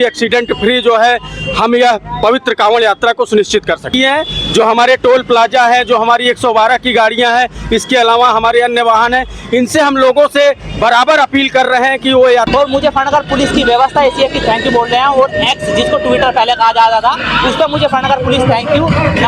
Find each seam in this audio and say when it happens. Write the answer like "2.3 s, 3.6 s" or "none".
3.9 s, 12.5 s